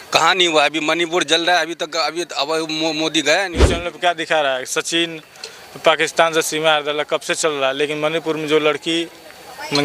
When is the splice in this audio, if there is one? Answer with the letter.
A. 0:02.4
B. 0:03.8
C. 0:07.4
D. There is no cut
B